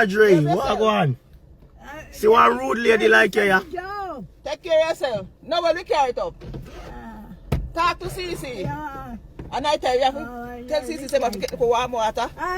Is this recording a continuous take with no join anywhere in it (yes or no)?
yes